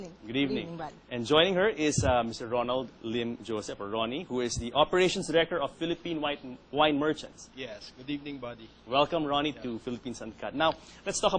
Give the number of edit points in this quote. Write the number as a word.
one